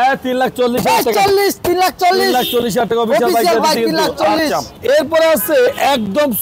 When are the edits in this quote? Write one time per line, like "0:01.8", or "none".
none